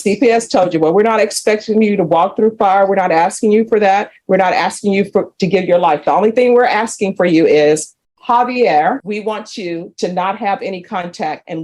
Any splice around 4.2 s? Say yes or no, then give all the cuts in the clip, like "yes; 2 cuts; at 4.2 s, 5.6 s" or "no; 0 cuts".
no; 1 cut; at 9.0 s